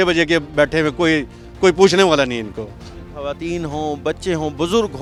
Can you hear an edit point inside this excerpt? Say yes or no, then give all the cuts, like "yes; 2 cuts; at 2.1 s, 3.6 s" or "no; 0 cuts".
no; 0 cuts